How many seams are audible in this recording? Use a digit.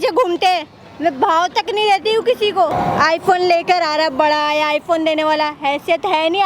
1